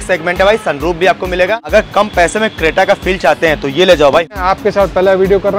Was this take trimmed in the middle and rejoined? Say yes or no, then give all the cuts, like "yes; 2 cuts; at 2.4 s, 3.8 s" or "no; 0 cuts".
yes; 2 cuts; at 1.7 s, 4.4 s